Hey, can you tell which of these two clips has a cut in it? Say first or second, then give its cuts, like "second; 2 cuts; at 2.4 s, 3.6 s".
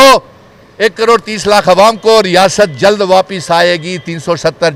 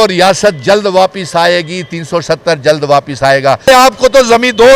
second; 1 cut; at 3.7 s